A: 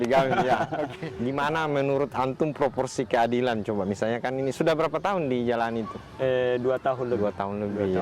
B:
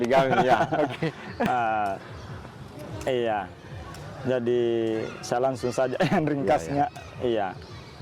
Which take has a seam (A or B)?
A